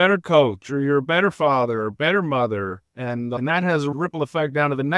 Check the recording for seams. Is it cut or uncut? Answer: cut